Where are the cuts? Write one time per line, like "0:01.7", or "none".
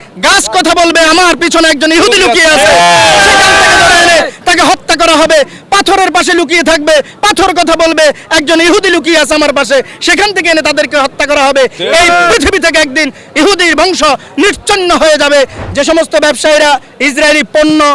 0:15.6